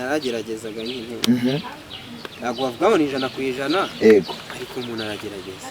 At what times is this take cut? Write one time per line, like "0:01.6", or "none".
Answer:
none

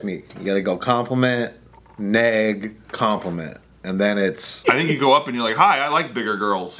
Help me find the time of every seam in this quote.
0:04.5

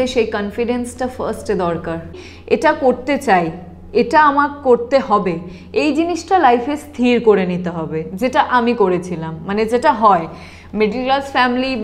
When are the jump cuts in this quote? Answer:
0:02.1

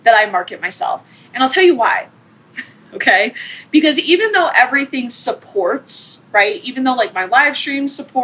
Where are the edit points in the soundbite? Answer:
none

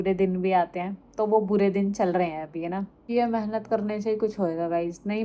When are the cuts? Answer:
0:03.1

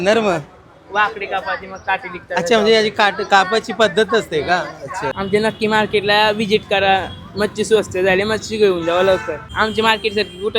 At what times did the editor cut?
0:05.1
0:09.4

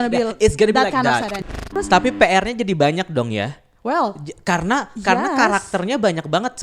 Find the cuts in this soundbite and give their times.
0:01.3

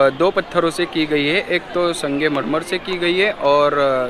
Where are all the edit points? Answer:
none

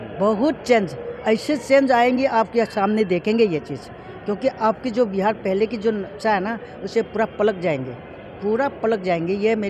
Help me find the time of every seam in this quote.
none

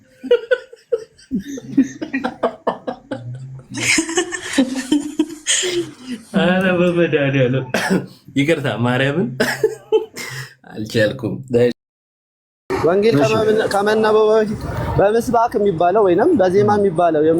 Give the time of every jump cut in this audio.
0:12.6

